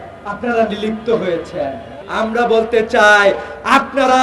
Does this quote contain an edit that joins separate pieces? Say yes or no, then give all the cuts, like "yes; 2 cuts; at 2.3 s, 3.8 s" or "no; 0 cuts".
yes; 1 cut; at 1.9 s